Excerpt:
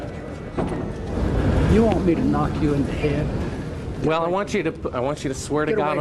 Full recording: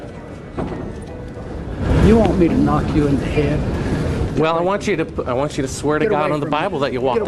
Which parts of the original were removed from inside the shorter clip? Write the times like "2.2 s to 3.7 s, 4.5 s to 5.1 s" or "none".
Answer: 1.1 s to 1.4 s